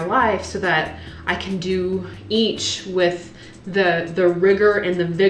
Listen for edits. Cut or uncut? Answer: uncut